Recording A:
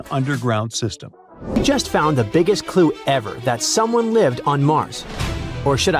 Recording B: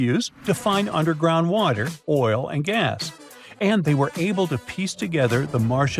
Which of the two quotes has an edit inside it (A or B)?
A